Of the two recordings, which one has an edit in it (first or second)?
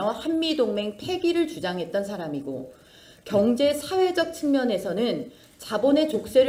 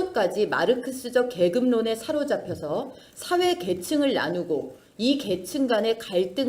second